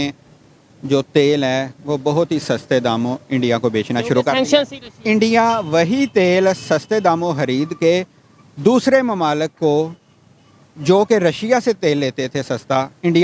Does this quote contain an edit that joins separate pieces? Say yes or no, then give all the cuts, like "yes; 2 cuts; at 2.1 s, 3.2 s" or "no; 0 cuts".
no; 0 cuts